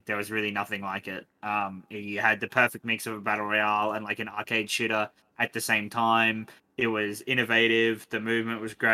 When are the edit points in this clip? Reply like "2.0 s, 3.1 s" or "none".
none